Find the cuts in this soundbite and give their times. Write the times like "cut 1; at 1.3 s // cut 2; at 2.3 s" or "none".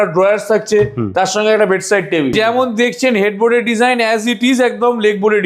cut 1; at 2.3 s